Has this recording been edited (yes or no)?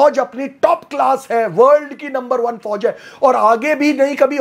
no